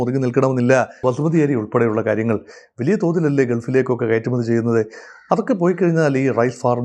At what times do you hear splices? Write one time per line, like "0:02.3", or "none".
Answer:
0:01.0